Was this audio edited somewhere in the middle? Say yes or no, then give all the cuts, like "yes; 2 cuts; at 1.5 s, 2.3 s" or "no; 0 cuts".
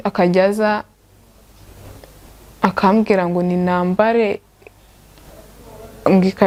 no; 0 cuts